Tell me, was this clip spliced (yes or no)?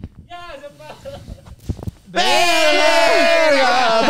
no